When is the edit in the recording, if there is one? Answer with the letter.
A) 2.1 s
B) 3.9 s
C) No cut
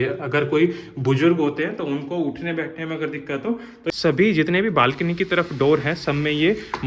B